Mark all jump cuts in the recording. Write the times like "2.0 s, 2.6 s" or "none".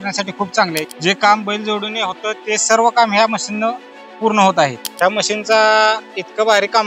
4.8 s